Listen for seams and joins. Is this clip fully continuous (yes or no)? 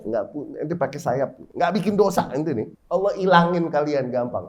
no